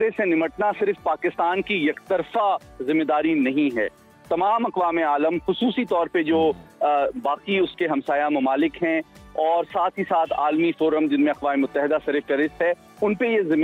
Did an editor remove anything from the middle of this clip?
no; 0 cuts

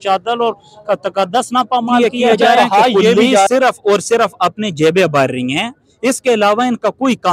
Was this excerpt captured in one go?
no; 1 cut; at 3.5 s

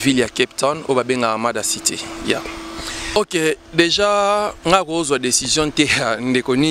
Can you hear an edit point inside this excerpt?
yes; 1 cut; at 3.2 s

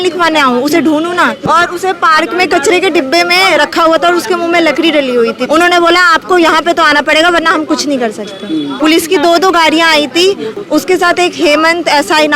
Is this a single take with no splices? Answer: no; 4 cuts; at 1.4 s, 5.4 s, 8.7 s, 10.5 s

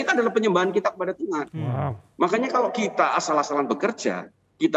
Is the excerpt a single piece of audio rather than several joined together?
yes; 0 cuts

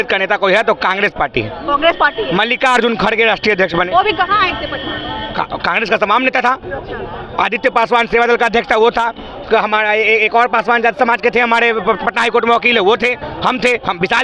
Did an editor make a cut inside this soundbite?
no; 0 cuts

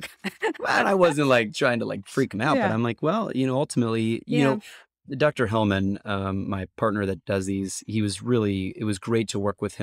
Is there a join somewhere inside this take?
no; 0 cuts

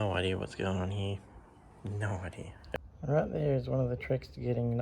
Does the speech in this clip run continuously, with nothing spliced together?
no; 1 cut; at 2.6 s

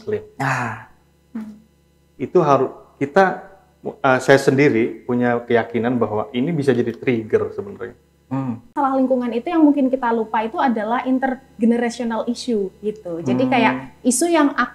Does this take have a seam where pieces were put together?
yes; 1 cut; at 8.7 s

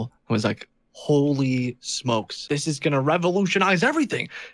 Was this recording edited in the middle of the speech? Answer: yes; 1 cut; at 2.3 s

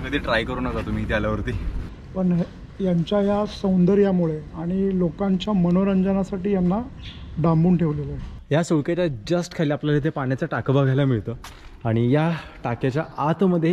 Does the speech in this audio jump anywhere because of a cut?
yes; 2 cuts; at 1.9 s, 8.4 s

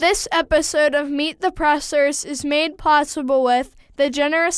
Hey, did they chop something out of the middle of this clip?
no; 0 cuts

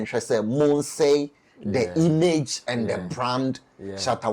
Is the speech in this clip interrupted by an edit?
no; 0 cuts

